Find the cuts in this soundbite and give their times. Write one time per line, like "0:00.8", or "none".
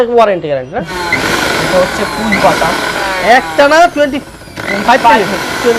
0:00.9

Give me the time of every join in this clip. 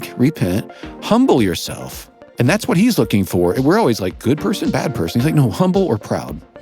0:02.6

